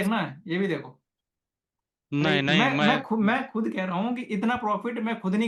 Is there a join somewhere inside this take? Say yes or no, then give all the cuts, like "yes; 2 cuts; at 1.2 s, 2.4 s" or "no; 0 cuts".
no; 0 cuts